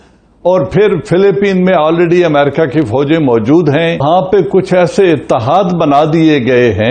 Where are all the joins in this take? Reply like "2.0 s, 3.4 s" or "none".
4.0 s